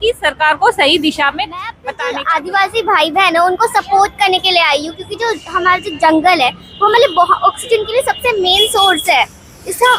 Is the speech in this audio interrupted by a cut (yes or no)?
yes